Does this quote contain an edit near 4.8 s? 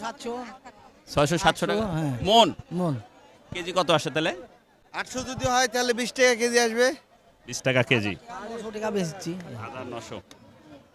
no; 0 cuts

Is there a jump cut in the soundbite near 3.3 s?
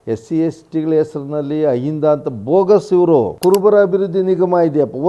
yes; 1 cut; at 3.3 s

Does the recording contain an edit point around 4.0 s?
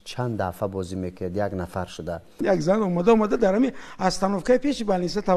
no; 1 cut; at 2.4 s

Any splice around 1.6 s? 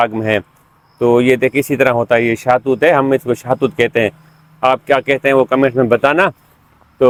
no; 0 cuts

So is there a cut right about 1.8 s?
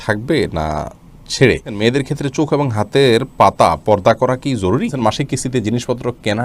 yes; 2 cuts; at 1.8 s, 4.9 s

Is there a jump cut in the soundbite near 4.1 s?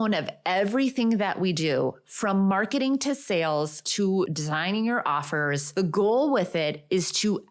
yes; 2 cuts; at 4.1 s, 5.6 s

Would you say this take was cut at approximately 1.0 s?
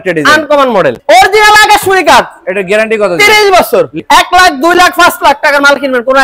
yes; 2 cuts; at 1.0 s, 4.0 s

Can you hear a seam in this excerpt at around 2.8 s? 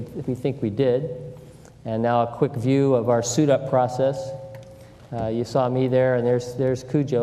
no; 0 cuts

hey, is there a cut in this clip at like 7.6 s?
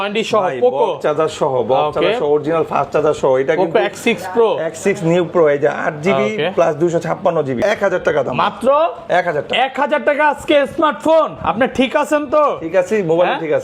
yes; 1 cut; at 7.6 s

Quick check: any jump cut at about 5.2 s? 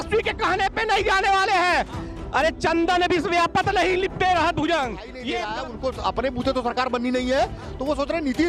yes; 1 cut; at 5.2 s

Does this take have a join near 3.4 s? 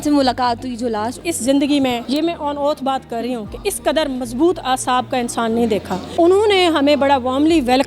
no; 3 cuts; at 1.3 s, 2.0 s, 6.0 s

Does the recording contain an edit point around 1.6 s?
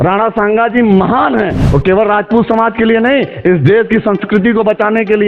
yes; 1 cut; at 1.6 s

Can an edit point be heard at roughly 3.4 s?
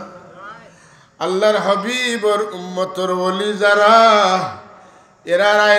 no; 0 cuts

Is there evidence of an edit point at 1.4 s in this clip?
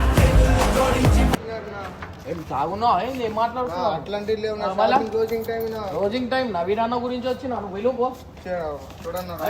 yes; 1 cut; at 1.4 s

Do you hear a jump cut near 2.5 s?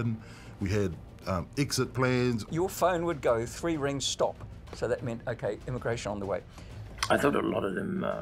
yes; 2 cuts; at 2.5 s, 6.6 s

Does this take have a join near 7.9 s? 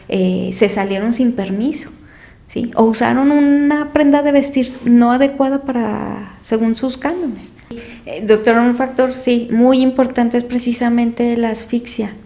yes; 1 cut; at 7.9 s

